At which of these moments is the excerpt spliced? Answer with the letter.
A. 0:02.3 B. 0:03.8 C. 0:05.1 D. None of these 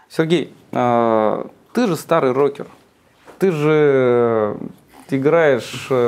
D